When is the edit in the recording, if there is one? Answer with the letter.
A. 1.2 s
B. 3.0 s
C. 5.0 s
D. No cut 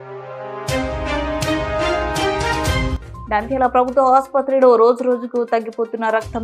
B